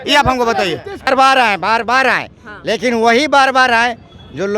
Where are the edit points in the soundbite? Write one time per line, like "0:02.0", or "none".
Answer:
0:01.1